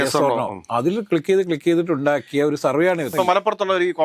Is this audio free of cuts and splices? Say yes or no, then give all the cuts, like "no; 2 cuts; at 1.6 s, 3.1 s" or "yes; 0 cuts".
no; 1 cut; at 3.1 s